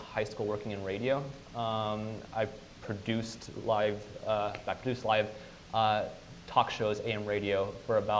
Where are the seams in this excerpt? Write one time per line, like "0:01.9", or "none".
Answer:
none